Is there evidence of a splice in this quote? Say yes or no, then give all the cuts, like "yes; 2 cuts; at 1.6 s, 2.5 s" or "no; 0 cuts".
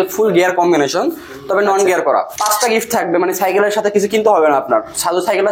yes; 1 cut; at 2.3 s